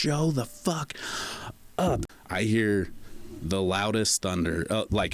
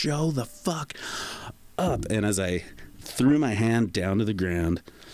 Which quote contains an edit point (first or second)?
first